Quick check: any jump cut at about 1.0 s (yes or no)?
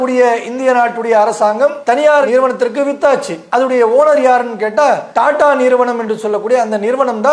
no